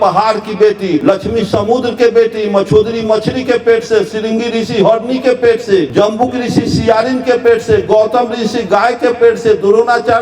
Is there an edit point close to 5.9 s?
yes; 2 cuts; at 1.0 s, 5.9 s

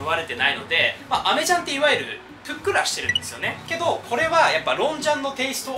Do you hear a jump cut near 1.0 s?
no; 0 cuts

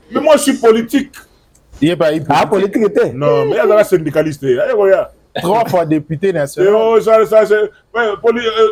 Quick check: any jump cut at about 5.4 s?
no; 0 cuts

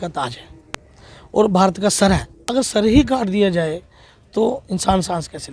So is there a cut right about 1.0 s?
no; 1 cut; at 2.4 s

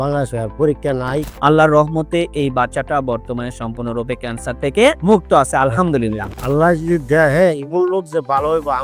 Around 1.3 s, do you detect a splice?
yes; 2 cuts; at 1.3 s, 6.3 s

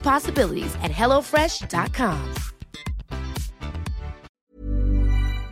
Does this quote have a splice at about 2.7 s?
no; 1 cut; at 4.3 s

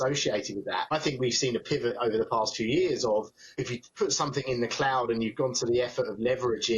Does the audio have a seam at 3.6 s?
yes; 2 cuts; at 0.9 s, 3.6 s

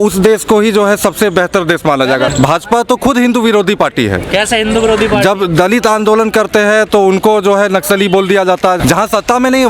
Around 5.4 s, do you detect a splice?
no; 2 cuts; at 2.3 s, 8.8 s

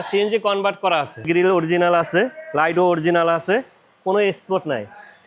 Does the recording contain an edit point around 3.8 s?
no; 1 cut; at 1.3 s

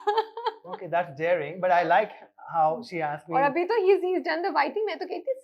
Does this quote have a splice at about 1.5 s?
no; 0 cuts

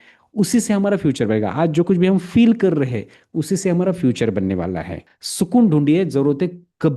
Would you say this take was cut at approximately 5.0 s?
yes; 1 cut; at 5.0 s

